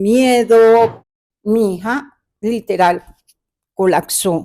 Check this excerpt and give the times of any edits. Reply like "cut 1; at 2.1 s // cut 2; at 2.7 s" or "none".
cut 1; at 1.0 s